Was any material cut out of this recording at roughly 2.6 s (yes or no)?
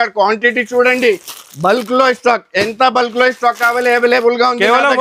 no